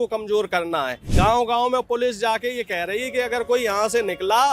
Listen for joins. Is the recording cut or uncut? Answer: cut